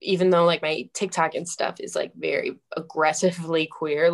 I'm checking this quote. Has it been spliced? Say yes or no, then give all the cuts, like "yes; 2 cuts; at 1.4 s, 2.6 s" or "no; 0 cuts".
no; 0 cuts